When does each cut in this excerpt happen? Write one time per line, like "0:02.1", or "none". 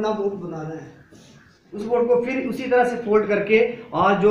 0:01.6